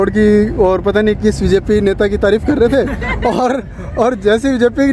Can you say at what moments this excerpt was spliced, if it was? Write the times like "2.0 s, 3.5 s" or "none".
none